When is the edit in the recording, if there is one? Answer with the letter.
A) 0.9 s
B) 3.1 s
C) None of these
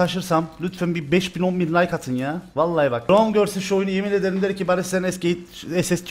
B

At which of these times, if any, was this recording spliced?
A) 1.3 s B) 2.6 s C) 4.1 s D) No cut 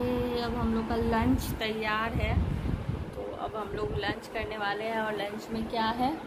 D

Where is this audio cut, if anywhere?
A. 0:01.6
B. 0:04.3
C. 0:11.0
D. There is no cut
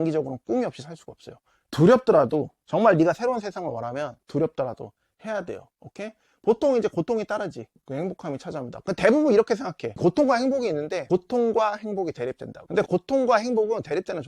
A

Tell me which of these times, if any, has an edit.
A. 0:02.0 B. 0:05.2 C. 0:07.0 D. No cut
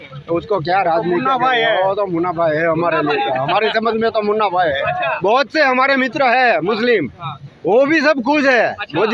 B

